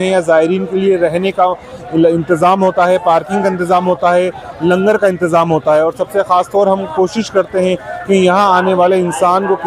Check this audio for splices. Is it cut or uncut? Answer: uncut